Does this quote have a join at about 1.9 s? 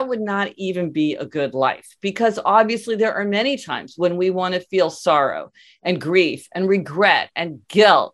no; 0 cuts

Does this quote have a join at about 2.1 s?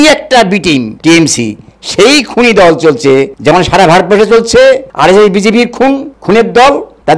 no; 4 cuts; at 0.9 s, 3.3 s, 4.9 s, 6.1 s

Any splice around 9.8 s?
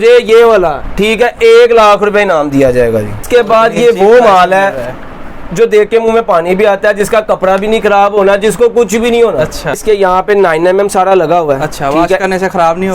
yes; 2 cuts; at 3.2 s, 9.8 s

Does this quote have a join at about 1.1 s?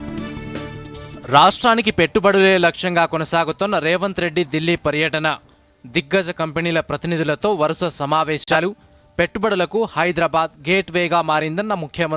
yes; 1 cut; at 1.1 s

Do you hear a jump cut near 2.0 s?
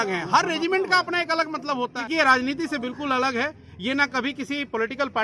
yes; 1 cut; at 2.0 s

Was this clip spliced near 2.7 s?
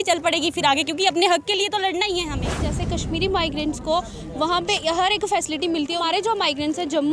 yes; 2 cuts; at 2.7 s, 6.0 s

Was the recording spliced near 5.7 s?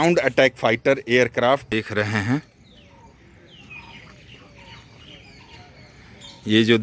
no; 1 cut; at 1.7 s

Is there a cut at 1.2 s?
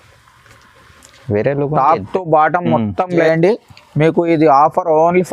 no; 1 cut; at 3.2 s

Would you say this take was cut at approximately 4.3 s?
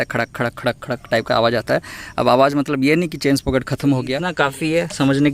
yes; 1 cut; at 4.3 s

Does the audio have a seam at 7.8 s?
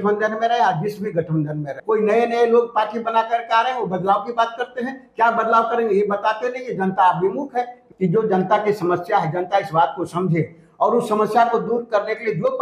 yes; 2 cuts; at 1.8 s, 7.8 s

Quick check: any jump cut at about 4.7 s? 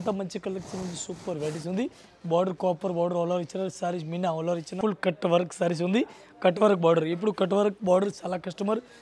yes; 1 cut; at 4.7 s

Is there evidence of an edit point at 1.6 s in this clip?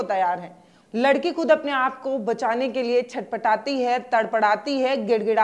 no; 0 cuts

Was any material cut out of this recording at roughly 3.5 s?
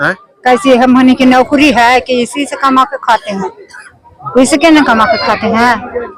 no; 0 cuts

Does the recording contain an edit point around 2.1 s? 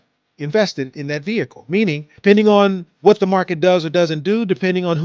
yes; 1 cut; at 2.1 s

